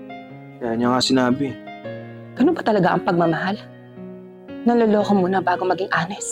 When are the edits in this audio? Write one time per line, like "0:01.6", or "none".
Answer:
none